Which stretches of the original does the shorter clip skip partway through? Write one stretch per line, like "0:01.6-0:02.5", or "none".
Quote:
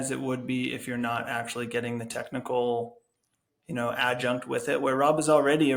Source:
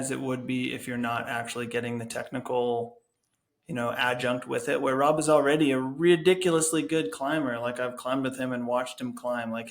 none

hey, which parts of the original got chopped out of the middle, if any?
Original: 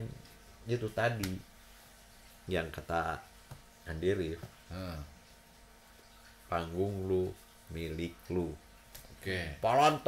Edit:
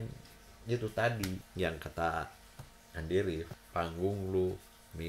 0:01.5-0:02.4
0:04.5-0:06.3

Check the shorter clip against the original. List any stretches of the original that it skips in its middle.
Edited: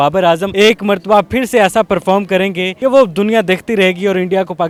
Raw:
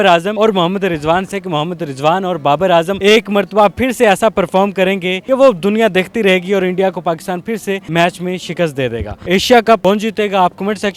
none

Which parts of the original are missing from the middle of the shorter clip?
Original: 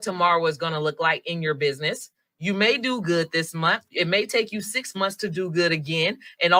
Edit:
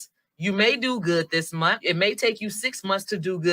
0:03.8-0:03.9

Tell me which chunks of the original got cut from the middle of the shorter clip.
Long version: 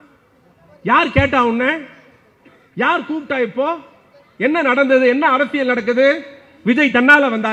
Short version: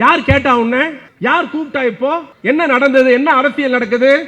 0:01.9-0:02.6
0:03.9-0:04.3

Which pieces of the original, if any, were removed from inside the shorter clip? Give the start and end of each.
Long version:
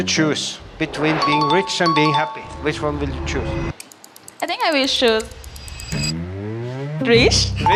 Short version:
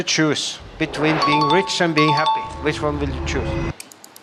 none

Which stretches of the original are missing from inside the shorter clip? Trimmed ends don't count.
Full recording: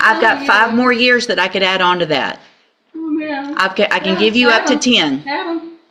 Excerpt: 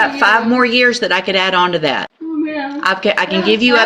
0:02.4-0:02.9

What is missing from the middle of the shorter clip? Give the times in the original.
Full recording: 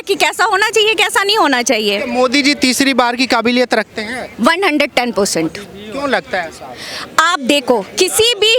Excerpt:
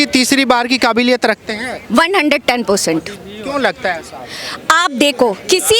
none

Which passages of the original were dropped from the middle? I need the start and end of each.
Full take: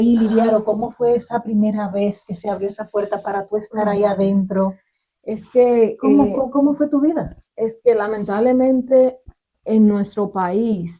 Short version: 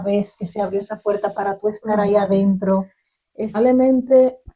0:05.4-0:08.3

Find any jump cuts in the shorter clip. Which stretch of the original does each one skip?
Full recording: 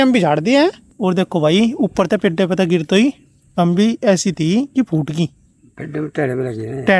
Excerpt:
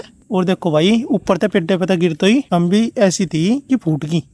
0:03.2-0:03.5

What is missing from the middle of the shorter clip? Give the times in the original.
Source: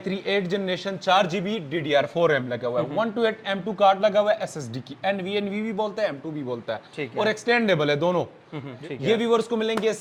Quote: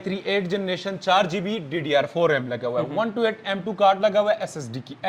none

